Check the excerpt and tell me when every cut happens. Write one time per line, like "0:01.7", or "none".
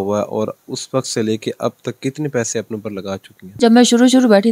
0:03.4